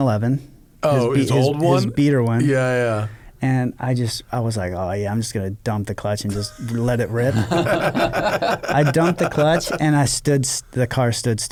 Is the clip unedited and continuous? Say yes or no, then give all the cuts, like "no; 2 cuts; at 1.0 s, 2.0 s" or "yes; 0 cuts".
yes; 0 cuts